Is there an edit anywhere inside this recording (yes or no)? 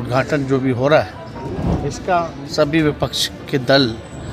no